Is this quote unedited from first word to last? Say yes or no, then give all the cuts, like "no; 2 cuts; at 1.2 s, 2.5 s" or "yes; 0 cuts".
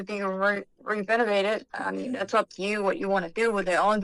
yes; 0 cuts